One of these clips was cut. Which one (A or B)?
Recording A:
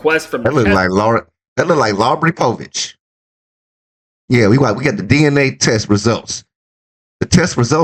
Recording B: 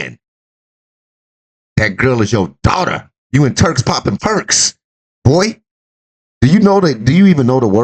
B